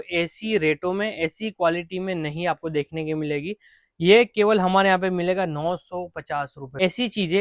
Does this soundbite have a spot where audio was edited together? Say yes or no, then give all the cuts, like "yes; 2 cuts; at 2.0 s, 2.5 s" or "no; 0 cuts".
no; 0 cuts